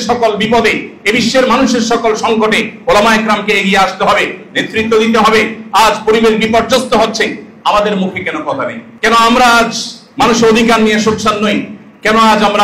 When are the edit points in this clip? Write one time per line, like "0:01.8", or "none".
0:08.8